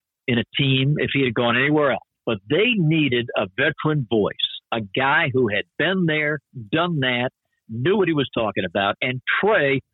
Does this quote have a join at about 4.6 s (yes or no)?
no